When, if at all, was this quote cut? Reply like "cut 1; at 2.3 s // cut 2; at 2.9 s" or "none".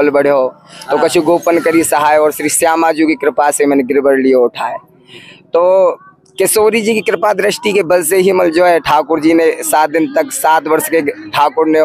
none

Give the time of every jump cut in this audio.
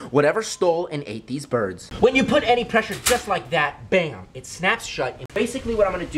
cut 1; at 1.8 s // cut 2; at 5.2 s

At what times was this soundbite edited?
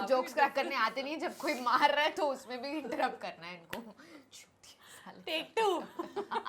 none

